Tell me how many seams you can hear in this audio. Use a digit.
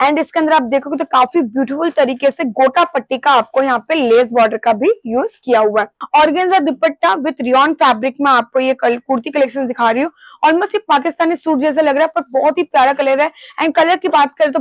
1